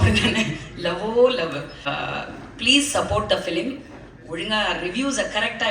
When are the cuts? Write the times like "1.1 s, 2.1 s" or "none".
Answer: 1.9 s